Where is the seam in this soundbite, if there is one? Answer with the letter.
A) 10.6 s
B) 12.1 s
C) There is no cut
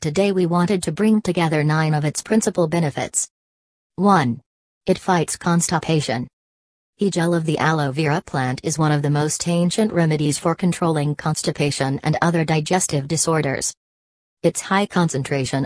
C